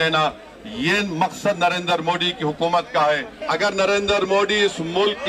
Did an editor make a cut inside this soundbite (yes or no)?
yes